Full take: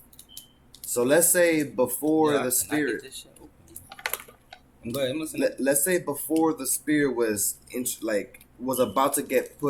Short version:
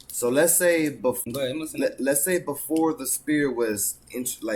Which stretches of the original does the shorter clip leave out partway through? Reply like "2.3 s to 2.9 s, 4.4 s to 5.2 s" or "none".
2.0 s to 4.8 s